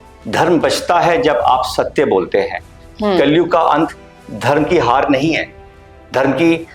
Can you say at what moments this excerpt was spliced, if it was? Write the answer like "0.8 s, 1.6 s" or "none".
2.8 s